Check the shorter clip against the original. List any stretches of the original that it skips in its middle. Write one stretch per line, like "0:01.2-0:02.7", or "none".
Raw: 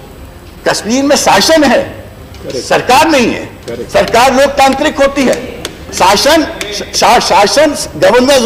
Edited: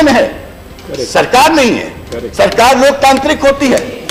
none